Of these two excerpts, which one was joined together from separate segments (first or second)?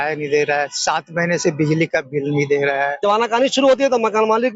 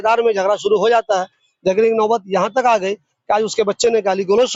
first